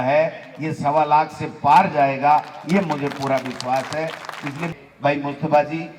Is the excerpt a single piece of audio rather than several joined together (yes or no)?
no